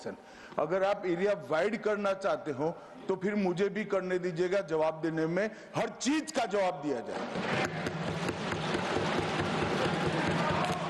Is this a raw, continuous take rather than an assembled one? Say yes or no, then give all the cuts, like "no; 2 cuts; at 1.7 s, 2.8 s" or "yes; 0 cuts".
yes; 0 cuts